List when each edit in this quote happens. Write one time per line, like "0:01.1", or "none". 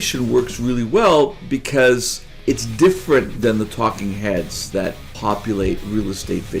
0:02.3
0:03.3
0:05.1